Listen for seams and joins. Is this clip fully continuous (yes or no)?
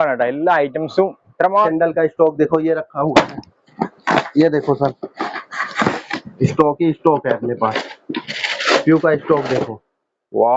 no